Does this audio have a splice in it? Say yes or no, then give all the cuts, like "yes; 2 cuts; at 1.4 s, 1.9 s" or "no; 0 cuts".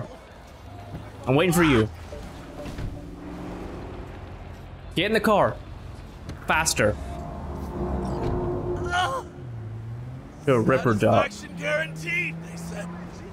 no; 0 cuts